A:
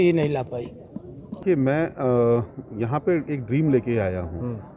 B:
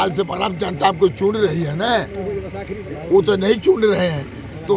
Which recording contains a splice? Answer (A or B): A